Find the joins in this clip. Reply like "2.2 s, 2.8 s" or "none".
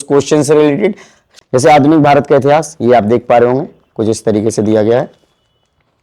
1.3 s